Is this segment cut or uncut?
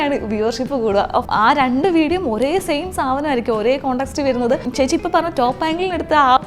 cut